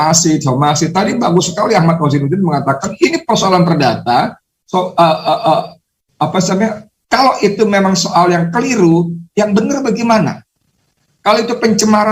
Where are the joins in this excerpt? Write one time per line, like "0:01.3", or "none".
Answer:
none